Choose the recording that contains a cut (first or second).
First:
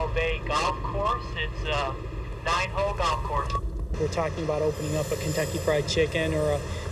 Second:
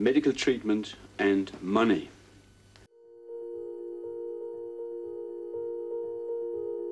second